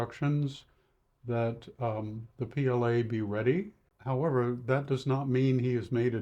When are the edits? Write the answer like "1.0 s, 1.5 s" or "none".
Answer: 3.8 s